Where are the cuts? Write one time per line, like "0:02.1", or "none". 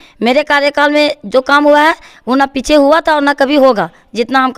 none